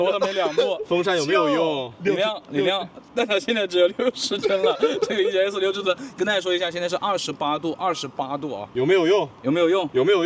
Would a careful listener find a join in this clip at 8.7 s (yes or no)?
yes